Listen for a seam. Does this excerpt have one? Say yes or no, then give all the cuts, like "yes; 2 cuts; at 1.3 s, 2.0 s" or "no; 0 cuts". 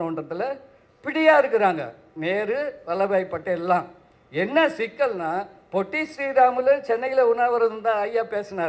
no; 0 cuts